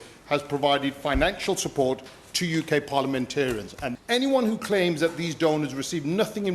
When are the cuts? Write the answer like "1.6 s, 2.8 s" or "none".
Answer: 3.8 s